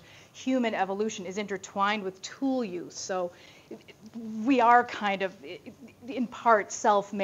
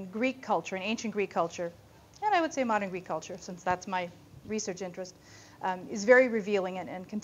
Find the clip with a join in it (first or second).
second